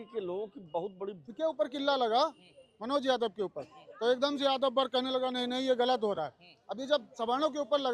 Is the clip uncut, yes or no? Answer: no